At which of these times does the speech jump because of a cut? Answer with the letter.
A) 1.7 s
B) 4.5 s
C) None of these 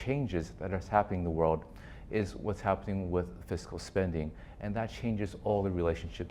C